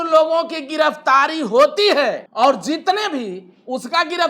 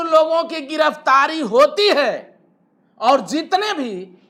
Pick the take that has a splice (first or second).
first